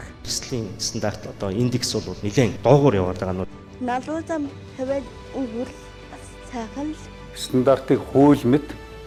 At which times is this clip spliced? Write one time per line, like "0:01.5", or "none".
none